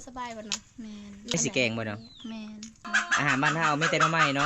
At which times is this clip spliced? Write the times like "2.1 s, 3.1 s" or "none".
1.3 s, 2.9 s

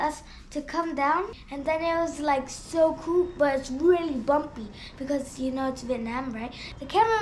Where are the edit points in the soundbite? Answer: 1.4 s

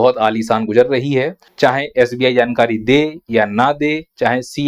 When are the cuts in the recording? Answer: 1.4 s

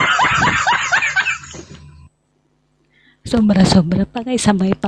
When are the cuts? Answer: 1.1 s

